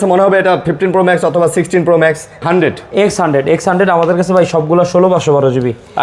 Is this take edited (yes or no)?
yes